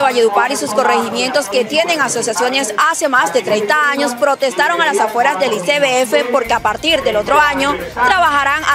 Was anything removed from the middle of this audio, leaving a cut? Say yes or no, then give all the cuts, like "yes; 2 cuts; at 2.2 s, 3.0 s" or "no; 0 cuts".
no; 0 cuts